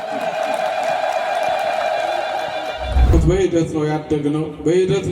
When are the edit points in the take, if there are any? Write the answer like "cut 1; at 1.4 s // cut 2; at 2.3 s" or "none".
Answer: cut 1; at 3.1 s